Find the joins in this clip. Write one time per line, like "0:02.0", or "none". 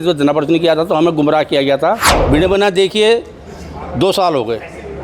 0:02.1